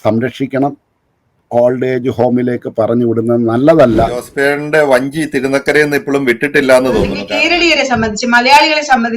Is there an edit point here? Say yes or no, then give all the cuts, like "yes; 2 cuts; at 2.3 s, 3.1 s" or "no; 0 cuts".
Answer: yes; 2 cuts; at 4.3 s, 7.2 s